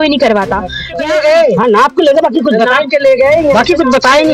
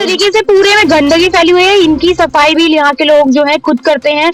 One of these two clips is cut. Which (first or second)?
first